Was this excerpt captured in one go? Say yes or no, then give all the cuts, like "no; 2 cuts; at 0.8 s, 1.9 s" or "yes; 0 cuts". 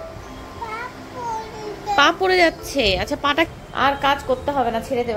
no; 1 cut; at 3.5 s